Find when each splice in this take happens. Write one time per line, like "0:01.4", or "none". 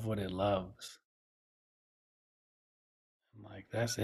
none